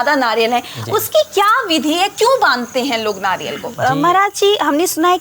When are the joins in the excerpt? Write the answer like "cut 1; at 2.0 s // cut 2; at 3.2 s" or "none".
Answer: cut 1; at 3.6 s